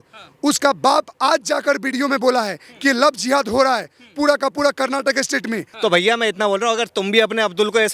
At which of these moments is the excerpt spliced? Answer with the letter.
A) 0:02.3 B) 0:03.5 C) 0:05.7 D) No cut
C